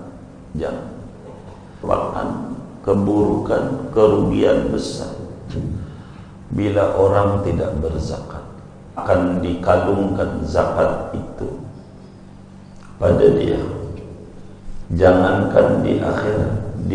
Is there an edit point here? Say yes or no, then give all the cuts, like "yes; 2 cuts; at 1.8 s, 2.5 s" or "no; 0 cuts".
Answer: yes; 2 cuts; at 1.8 s, 9.0 s